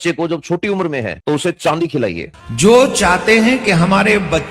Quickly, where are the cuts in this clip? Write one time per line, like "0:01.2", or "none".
0:01.1
0:02.3